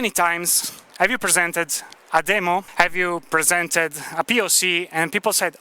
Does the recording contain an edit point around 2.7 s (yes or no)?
yes